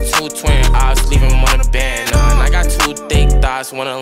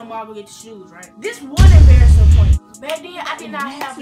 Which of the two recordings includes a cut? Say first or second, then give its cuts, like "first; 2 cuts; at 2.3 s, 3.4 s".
second; 1 cut; at 1.1 s